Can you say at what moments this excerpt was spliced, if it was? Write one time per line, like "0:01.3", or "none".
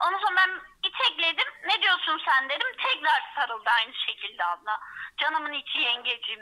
none